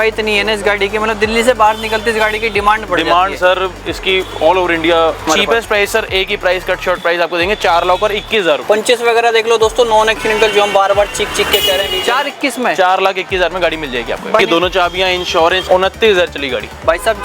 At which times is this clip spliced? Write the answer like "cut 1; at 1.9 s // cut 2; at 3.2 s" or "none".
cut 1; at 5.3 s // cut 2; at 8.6 s // cut 3; at 12.0 s // cut 4; at 14.4 s // cut 5; at 15.6 s